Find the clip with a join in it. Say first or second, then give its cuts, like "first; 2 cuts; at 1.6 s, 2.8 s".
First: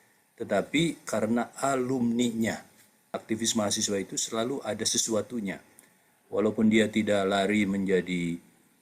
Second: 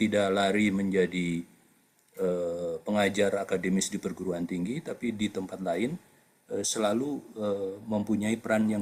first; 1 cut; at 3.1 s